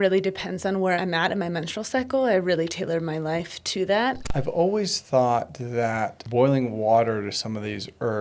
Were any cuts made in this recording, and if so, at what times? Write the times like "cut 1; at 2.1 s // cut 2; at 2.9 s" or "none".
cut 1; at 1.0 s // cut 2; at 4.2 s // cut 3; at 6.2 s